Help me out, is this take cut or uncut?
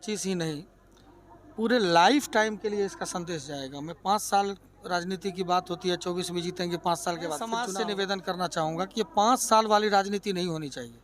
cut